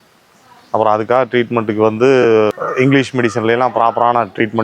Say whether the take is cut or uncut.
cut